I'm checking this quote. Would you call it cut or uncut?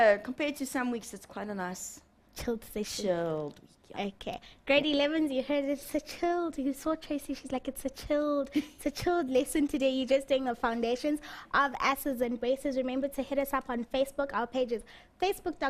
uncut